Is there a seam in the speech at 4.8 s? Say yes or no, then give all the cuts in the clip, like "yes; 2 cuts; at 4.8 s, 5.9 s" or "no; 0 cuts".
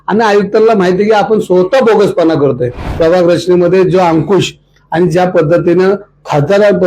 no; 1 cut; at 2.9 s